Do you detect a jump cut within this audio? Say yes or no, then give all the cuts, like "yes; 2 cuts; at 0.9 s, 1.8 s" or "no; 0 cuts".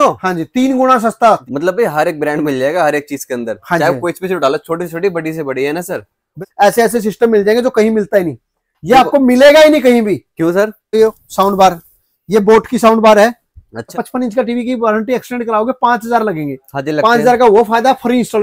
yes; 4 cuts; at 1.4 s, 6.4 s, 11.0 s, 13.9 s